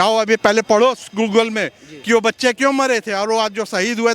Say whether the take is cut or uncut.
uncut